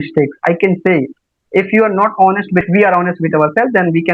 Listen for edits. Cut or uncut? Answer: cut